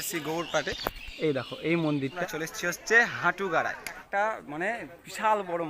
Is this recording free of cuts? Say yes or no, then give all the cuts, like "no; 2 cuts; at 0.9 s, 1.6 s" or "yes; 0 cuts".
no; 2 cuts; at 2.2 s, 4.0 s